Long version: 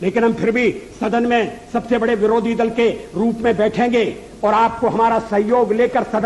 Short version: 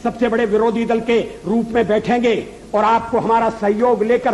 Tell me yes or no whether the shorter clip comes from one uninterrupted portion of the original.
yes